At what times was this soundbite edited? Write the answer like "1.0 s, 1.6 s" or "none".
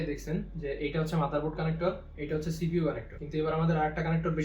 2.1 s, 3.1 s